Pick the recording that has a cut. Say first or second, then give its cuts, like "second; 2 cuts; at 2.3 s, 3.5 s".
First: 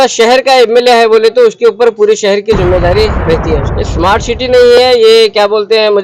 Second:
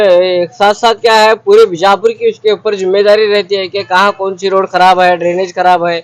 first; 1 cut; at 3.8 s